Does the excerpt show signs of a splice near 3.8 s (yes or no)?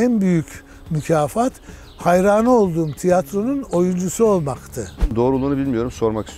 no